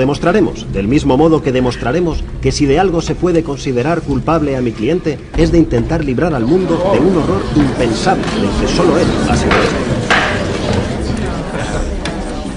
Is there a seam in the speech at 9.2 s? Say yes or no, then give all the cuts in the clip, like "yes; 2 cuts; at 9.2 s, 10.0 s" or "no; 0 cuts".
yes; 1 cut; at 9.2 s